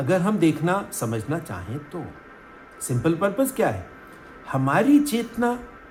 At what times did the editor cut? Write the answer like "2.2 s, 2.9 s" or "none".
none